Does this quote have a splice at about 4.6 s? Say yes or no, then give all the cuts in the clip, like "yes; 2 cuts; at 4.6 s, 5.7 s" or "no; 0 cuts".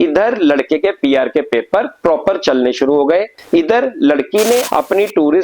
yes; 2 cuts; at 3.4 s, 4.6 s